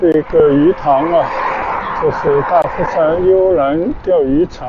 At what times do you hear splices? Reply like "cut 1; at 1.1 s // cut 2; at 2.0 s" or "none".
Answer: none